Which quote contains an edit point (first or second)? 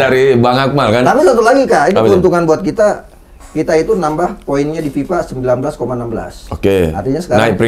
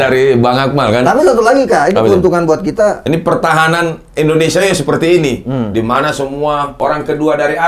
second